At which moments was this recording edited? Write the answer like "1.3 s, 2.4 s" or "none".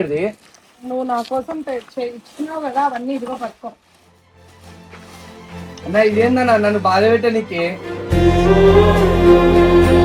none